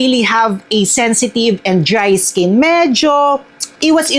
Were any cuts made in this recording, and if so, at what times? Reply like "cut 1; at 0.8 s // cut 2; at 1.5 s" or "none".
none

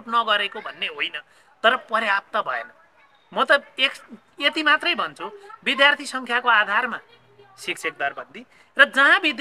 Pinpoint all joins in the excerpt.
none

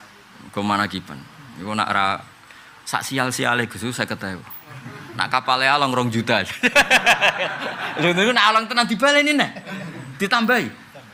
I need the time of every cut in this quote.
none

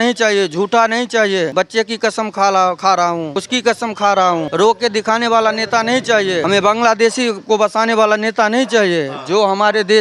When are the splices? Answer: cut 1; at 1.5 s // cut 2; at 3.4 s // cut 3; at 4.5 s // cut 4; at 6.4 s

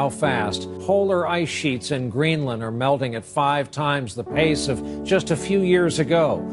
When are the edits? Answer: none

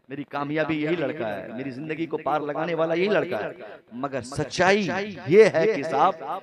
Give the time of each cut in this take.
none

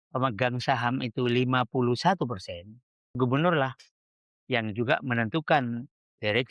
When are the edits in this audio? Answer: cut 1; at 3.1 s

